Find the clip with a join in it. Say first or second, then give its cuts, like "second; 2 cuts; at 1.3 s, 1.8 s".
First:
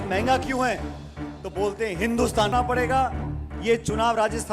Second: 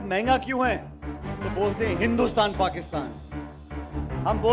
first; 1 cut; at 2.5 s